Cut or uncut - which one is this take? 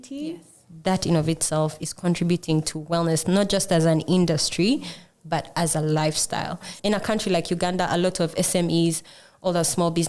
cut